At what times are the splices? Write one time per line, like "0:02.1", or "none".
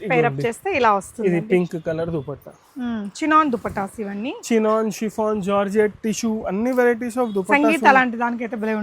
none